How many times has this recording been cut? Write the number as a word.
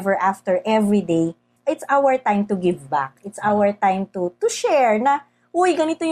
one